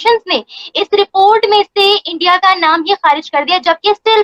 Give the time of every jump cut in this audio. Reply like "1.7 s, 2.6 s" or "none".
none